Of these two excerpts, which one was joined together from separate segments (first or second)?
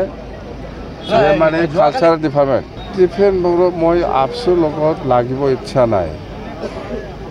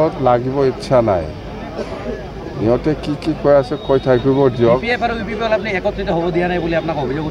first